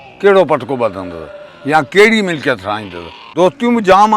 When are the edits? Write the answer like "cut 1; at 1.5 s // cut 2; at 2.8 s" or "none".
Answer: cut 1; at 3.2 s